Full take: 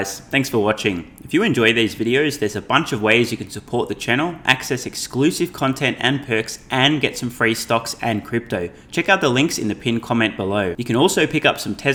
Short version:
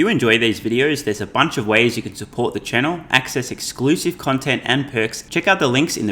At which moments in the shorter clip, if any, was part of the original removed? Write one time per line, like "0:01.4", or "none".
0:05.2